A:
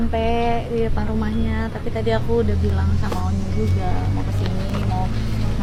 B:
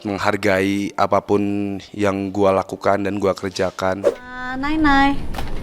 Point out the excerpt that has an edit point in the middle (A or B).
B